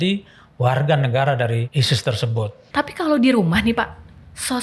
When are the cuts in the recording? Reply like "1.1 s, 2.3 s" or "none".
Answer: 1.7 s, 2.6 s